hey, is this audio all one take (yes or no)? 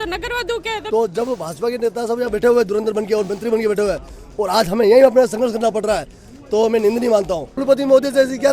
no